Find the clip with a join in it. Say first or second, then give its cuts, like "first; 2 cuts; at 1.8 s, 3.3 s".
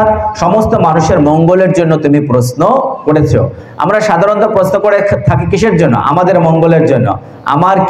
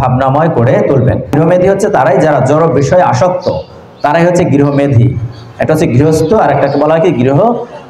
second; 1 cut; at 1.3 s